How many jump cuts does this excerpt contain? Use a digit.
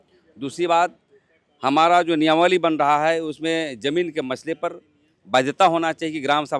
0